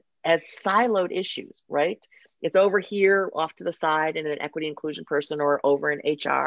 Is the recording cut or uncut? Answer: uncut